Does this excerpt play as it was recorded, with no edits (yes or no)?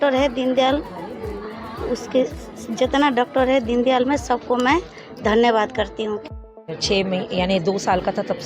no